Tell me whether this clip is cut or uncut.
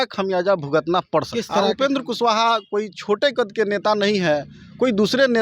cut